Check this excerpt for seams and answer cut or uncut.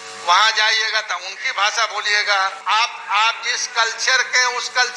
cut